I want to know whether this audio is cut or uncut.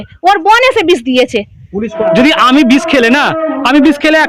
cut